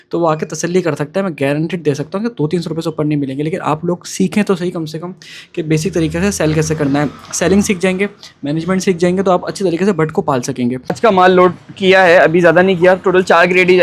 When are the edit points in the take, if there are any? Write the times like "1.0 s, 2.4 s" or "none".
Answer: 10.9 s